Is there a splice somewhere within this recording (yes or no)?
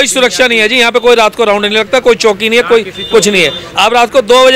no